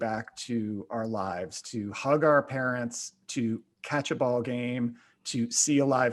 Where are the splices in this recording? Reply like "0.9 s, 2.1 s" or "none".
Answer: none

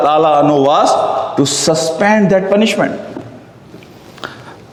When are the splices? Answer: none

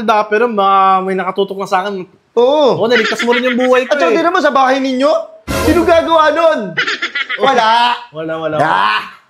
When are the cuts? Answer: none

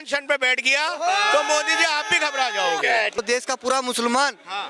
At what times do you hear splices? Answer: 3.2 s

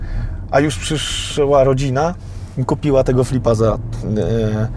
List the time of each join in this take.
none

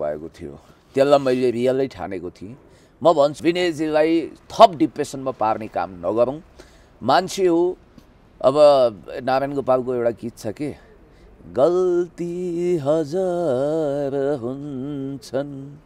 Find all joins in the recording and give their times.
3.4 s

